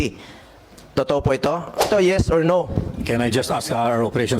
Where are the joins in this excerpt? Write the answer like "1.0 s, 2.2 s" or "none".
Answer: 1.9 s